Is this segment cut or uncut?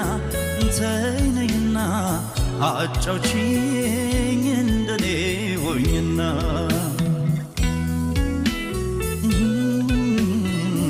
uncut